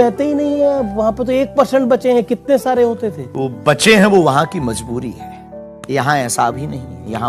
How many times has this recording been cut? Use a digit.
1